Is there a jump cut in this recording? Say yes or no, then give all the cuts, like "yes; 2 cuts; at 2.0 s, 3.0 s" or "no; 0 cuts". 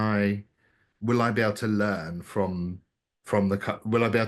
no; 0 cuts